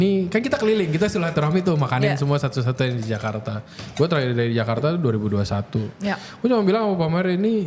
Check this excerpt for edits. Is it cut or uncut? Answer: uncut